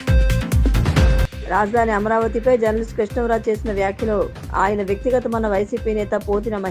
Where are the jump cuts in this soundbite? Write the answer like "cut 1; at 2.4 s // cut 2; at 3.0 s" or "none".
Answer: none